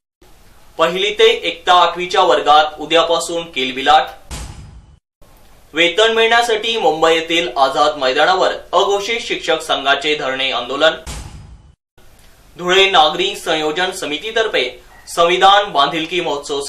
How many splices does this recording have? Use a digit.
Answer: 0